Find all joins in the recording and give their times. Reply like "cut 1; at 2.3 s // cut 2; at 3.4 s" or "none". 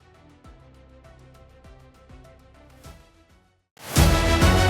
cut 1; at 3.8 s